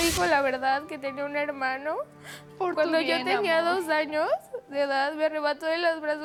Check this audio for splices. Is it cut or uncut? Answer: uncut